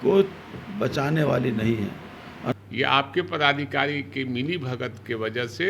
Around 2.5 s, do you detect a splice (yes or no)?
yes